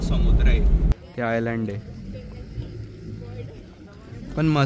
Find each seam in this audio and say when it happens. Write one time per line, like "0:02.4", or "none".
0:00.9

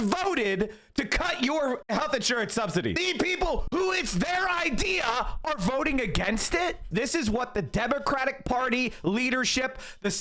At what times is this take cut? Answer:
0:03.0
0:06.8

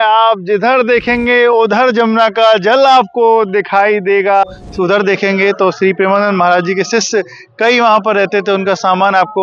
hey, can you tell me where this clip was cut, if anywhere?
0:04.4

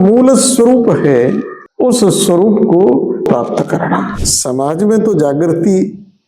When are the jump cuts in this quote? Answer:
0:04.2

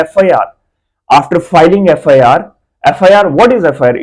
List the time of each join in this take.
none

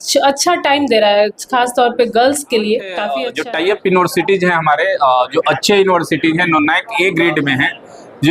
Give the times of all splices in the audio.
0:03.2

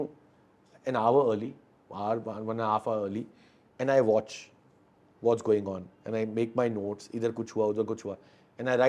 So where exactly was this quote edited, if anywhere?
none

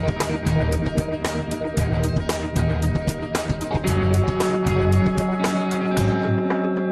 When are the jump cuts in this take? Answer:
none

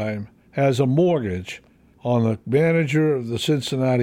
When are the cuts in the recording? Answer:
0:02.2

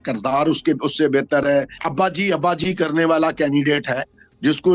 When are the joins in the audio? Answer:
0:01.8

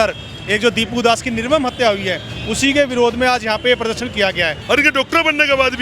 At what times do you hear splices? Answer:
0:04.6

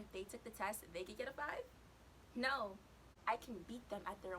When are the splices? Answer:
0:03.1

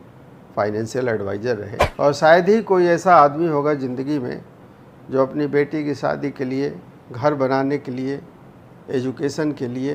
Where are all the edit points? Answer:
0:01.8

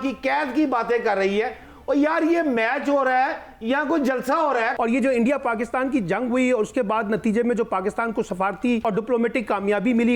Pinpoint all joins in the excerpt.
0:04.7
0:08.8

